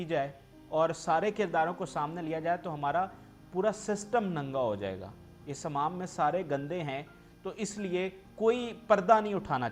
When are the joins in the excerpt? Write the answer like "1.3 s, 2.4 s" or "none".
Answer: none